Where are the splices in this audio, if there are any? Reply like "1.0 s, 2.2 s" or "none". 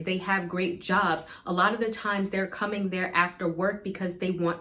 none